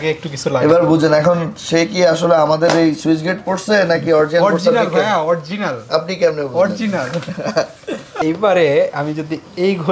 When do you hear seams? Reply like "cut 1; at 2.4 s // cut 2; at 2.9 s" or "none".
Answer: cut 1; at 8.2 s

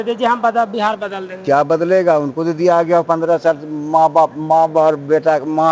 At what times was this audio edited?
none

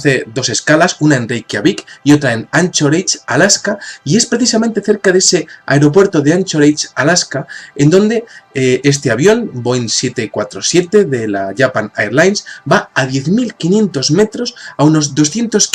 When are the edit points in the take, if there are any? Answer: cut 1; at 3.9 s

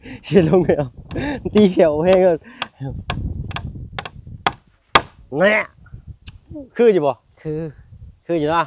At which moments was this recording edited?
cut 1; at 3.9 s

